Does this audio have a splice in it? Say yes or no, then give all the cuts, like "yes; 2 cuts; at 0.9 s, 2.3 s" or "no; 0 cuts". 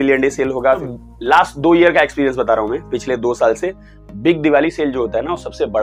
yes; 1 cut; at 0.9 s